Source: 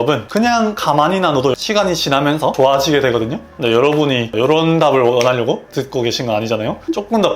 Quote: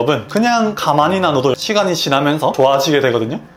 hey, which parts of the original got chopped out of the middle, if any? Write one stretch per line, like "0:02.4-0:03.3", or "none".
none